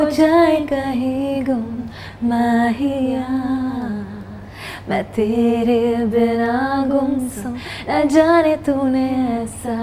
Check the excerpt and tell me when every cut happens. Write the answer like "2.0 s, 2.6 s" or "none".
none